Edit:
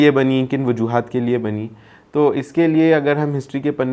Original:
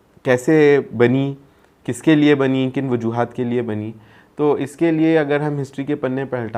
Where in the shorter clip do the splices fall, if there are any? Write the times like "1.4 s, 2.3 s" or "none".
none